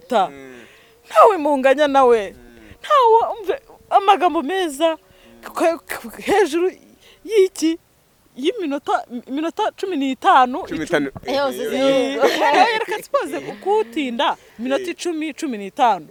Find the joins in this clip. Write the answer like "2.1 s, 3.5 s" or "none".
none